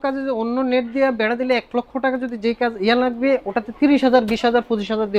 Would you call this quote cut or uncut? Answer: uncut